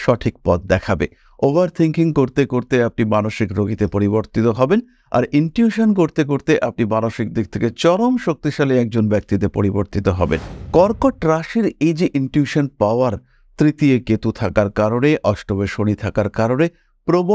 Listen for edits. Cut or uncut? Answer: uncut